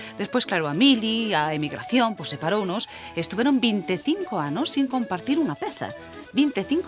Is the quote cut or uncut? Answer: cut